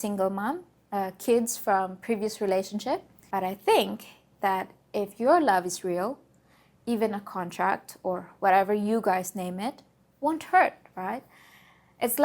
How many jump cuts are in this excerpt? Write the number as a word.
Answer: one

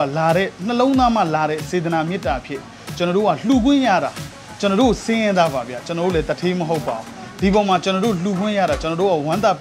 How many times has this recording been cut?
zero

